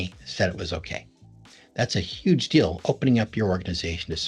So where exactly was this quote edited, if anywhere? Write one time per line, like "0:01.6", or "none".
none